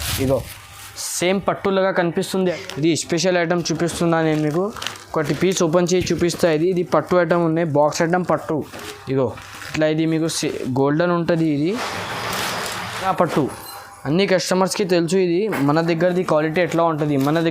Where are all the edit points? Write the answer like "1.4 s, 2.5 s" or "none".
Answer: 2.6 s, 13.1 s